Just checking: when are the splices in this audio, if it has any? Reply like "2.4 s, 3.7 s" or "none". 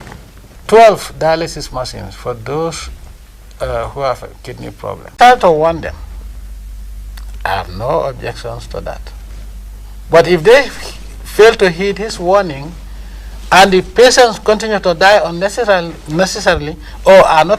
5.2 s